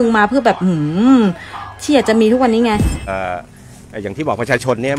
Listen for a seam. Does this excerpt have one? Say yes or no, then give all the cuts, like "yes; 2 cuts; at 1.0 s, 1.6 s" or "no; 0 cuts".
yes; 1 cut; at 3.0 s